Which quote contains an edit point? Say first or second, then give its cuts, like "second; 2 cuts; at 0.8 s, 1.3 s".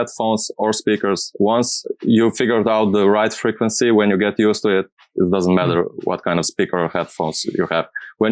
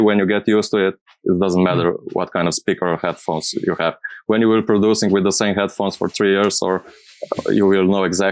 first; 1 cut; at 1.9 s